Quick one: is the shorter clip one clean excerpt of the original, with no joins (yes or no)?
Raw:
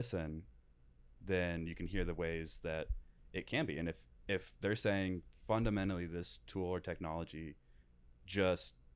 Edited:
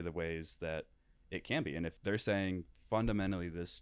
no